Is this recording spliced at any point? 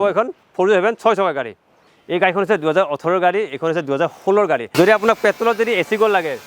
yes; 2 cuts; at 1.6 s, 4.7 s

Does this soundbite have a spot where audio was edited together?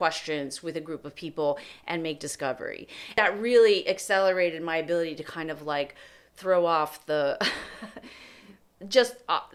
no; 0 cuts

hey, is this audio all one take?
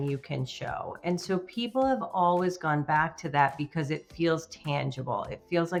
yes; 0 cuts

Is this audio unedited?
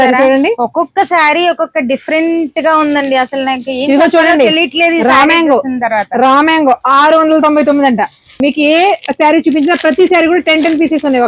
no; 1 cut; at 8.4 s

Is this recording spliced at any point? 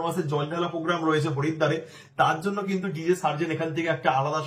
no; 0 cuts

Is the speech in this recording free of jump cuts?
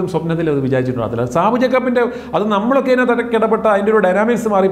yes; 0 cuts

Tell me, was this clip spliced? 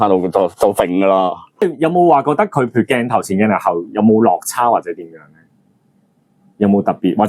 yes; 1 cut; at 1.6 s

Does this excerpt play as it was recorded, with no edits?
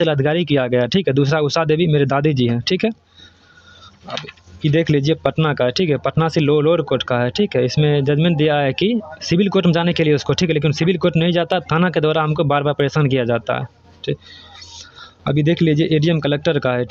yes; 0 cuts

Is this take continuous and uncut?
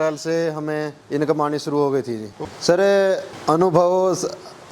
no; 1 cut; at 2.5 s

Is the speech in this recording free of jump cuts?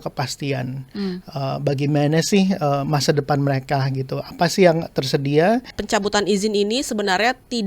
no; 1 cut; at 5.8 s

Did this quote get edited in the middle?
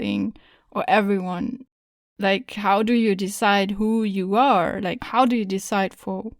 yes; 1 cut; at 5.0 s

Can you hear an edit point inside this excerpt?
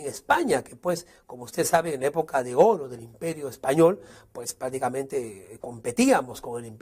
yes; 1 cut; at 2.0 s

